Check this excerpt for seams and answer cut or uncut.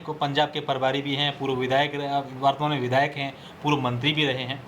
uncut